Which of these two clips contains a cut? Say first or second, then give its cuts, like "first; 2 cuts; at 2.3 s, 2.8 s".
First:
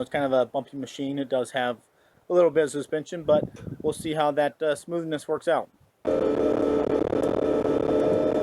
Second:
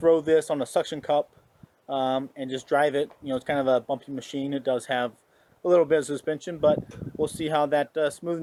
first; 1 cut; at 6.1 s